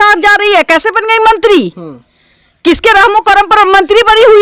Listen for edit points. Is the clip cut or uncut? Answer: uncut